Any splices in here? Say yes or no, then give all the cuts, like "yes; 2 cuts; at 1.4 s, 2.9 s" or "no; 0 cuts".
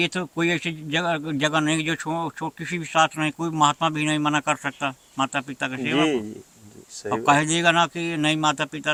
no; 0 cuts